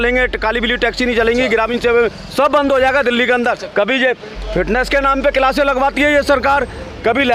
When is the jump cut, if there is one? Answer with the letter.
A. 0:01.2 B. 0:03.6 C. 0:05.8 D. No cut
B